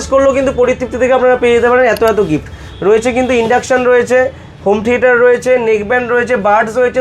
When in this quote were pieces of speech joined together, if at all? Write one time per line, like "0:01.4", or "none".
none